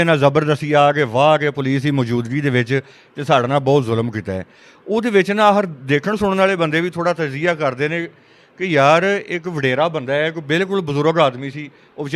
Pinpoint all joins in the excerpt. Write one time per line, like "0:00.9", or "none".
none